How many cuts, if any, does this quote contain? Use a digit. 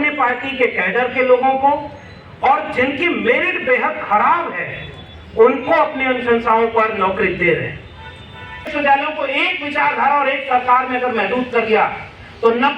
1